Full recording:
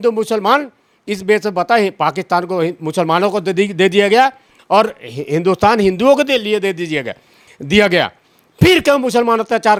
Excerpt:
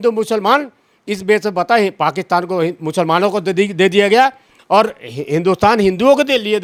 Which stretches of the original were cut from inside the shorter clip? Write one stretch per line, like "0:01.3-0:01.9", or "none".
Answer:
none